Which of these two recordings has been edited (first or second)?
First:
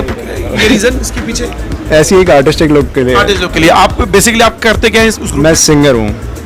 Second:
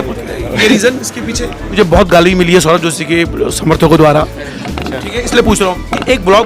second